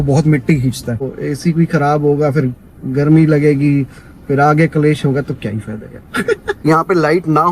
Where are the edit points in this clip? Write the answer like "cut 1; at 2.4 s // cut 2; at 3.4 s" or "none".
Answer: cut 1; at 1.2 s // cut 2; at 6.5 s